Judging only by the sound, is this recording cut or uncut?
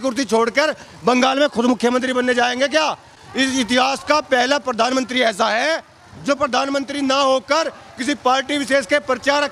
uncut